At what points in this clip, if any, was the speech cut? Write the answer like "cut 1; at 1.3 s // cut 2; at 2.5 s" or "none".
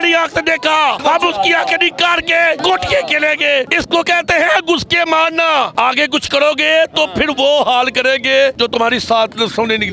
cut 1; at 1.0 s // cut 2; at 2.6 s // cut 3; at 3.8 s // cut 4; at 5.7 s // cut 5; at 8.5 s